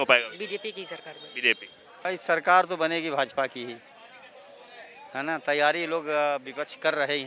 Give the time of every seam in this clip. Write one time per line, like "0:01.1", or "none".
0:02.0

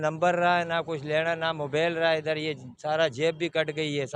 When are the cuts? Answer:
none

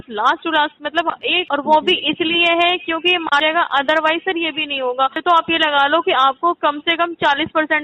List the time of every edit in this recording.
0:01.4
0:03.4
0:05.2

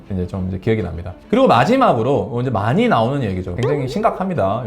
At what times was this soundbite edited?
0:01.1
0:03.5

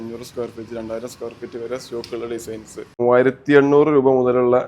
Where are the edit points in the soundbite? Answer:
0:03.0

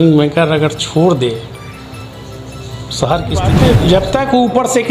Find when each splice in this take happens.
0:03.5

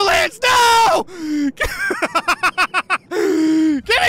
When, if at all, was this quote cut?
none

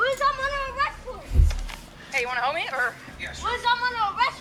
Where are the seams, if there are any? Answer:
none

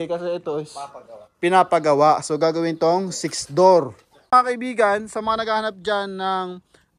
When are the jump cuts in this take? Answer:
0:04.3

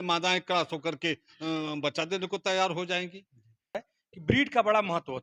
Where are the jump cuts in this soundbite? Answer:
0:03.8

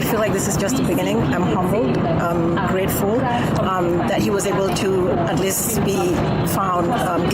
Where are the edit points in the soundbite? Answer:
none

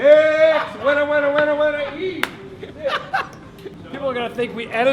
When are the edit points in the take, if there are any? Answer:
0:03.8

